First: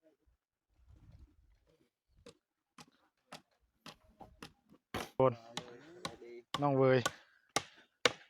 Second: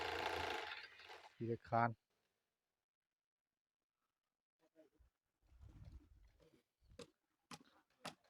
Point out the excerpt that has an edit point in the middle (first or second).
first